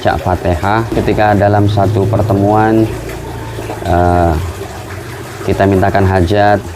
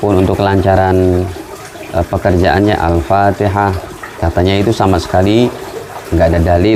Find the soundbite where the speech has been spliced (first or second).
first